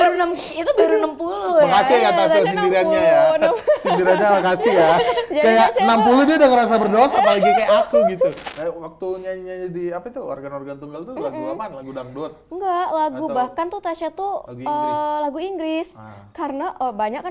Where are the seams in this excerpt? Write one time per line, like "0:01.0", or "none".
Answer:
0:08.4